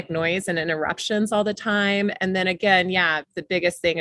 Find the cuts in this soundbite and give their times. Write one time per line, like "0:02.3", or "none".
none